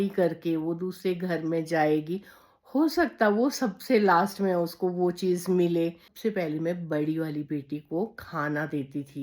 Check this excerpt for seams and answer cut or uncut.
cut